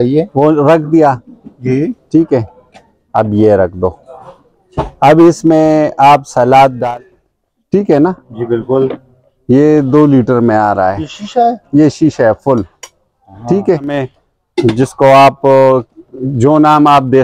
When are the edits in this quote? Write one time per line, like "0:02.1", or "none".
0:06.8
0:14.1